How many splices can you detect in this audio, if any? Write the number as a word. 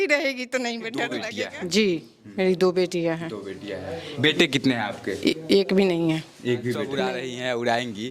two